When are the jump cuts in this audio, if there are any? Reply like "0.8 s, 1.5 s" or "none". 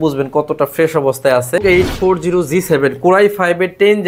1.6 s